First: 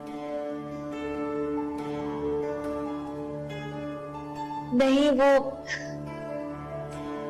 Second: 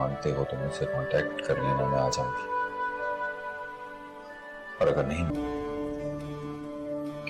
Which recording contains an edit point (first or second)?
second